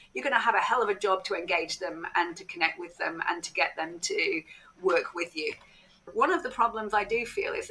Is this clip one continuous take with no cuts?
no; 1 cut; at 6.1 s

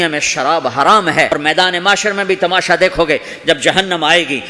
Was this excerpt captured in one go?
no; 1 cut; at 1.4 s

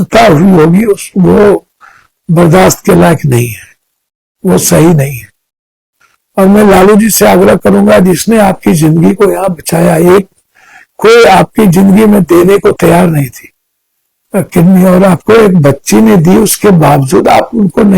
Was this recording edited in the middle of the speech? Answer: no; 0 cuts

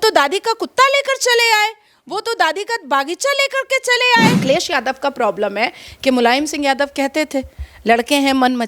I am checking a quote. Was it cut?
yes; 1 cut; at 4.4 s

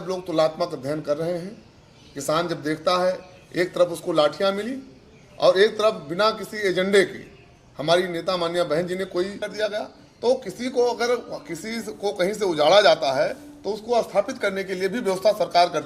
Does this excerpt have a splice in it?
yes; 1 cut; at 9.4 s

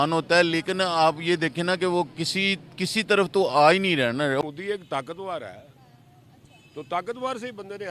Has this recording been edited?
yes; 1 cut; at 4.4 s

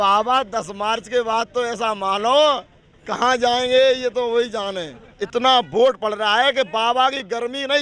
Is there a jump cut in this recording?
yes; 1 cut; at 5.1 s

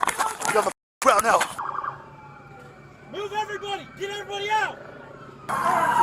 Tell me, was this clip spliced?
yes; 1 cut; at 1.5 s

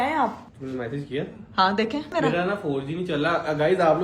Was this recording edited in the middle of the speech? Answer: yes; 1 cut; at 2.1 s

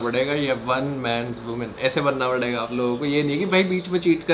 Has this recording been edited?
no; 0 cuts

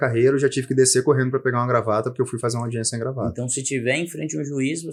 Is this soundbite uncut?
yes; 0 cuts

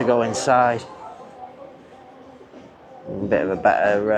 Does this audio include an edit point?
no; 0 cuts

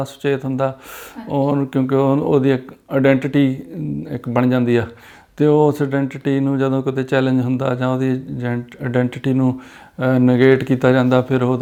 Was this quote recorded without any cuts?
yes; 0 cuts

